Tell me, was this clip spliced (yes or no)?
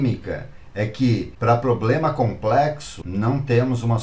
yes